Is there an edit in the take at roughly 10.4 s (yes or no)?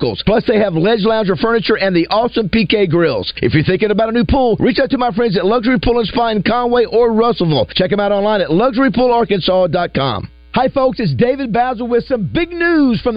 yes